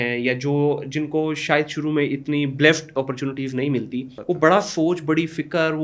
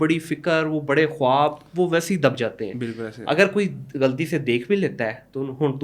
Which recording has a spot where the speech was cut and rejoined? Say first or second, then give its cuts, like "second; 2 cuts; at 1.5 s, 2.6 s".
first; 1 cut; at 4.1 s